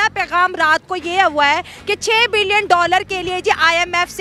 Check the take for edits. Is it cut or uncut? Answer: uncut